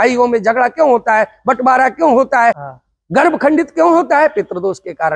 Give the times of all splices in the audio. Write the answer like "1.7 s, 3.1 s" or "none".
2.6 s